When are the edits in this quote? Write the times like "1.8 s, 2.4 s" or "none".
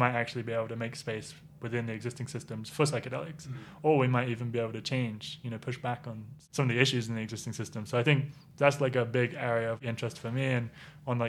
6.3 s, 9.8 s

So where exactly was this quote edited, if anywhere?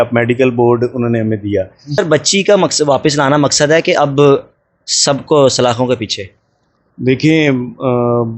1.8 s

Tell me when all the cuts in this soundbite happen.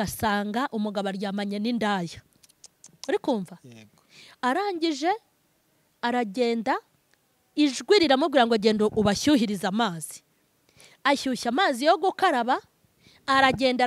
none

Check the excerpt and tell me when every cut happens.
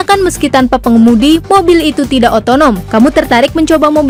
none

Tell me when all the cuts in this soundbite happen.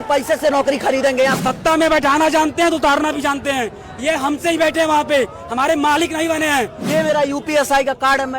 1.4 s, 6.8 s

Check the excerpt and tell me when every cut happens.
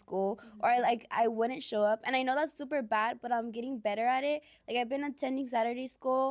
none

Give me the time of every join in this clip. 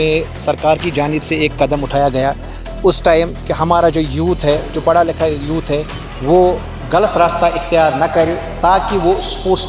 none

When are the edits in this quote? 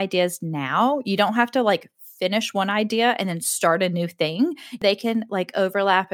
4.8 s

